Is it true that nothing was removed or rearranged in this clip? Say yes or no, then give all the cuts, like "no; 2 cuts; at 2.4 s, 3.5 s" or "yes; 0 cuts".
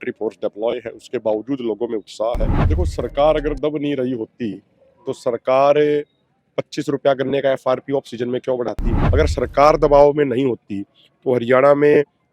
no; 2 cuts; at 2.6 s, 8.9 s